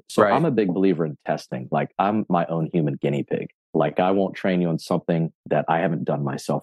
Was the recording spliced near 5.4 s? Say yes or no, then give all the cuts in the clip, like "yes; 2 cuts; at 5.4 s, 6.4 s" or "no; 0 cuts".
no; 1 cut; at 3.6 s